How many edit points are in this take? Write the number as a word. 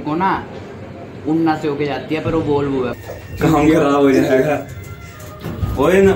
one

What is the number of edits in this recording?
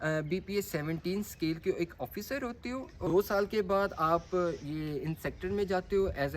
one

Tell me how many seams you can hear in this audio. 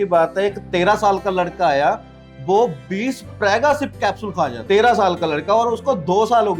one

